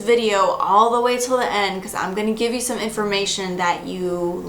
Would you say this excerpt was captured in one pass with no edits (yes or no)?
yes